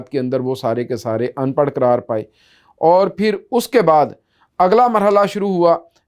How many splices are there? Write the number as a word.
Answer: zero